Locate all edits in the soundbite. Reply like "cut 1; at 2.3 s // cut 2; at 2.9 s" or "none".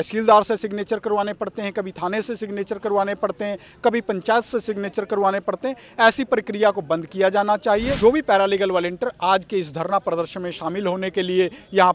cut 1; at 7.9 s

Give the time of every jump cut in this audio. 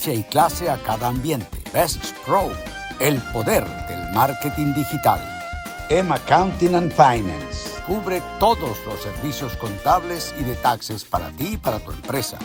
none

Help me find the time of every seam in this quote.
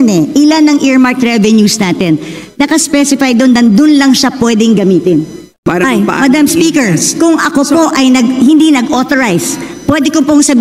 cut 1; at 5.6 s

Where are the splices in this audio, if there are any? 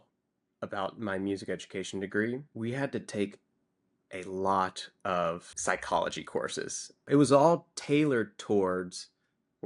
cut 1; at 2.5 s

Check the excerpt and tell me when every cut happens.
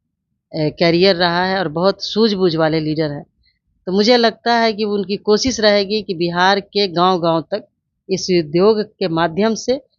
none

